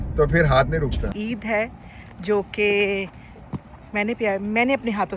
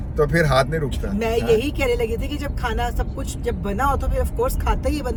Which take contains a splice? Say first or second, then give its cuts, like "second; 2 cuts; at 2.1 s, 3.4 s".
first; 1 cut; at 1.0 s